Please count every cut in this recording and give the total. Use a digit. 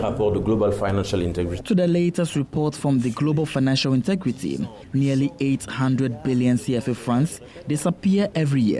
2